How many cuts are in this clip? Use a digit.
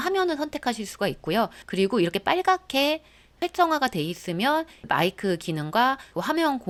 0